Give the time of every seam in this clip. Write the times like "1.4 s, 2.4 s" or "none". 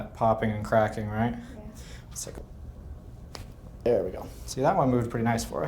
2.4 s